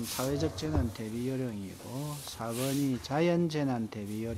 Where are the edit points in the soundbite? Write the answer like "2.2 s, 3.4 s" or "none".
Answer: none